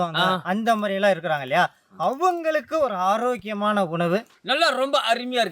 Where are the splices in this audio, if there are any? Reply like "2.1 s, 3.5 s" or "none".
4.3 s